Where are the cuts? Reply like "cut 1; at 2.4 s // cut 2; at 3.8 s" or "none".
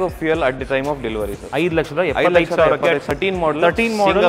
cut 1; at 1.4 s // cut 2; at 3.1 s